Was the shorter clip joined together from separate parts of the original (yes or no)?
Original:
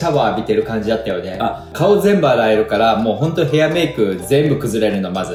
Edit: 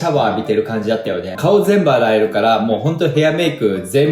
yes